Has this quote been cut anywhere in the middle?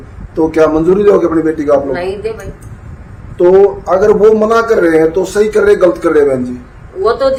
no; 0 cuts

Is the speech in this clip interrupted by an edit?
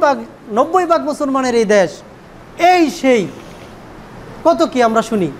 no; 0 cuts

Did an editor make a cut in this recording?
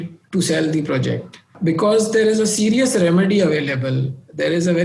yes; 1 cut; at 1.5 s

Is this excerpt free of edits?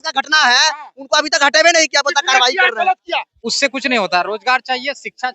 no; 1 cut; at 3.3 s

